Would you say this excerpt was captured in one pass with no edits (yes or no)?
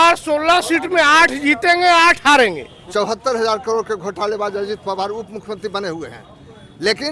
no